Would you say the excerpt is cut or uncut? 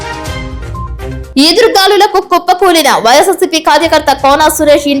uncut